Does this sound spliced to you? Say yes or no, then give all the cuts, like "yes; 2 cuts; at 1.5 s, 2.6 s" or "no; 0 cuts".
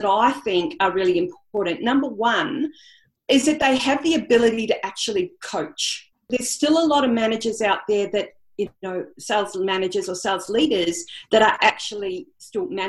yes; 1 cut; at 6.2 s